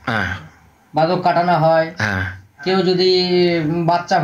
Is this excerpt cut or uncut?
uncut